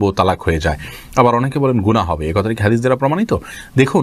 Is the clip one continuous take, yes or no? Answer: yes